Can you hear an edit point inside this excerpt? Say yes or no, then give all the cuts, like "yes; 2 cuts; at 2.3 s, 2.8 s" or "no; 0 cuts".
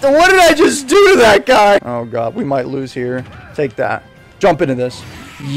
yes; 1 cut; at 1.9 s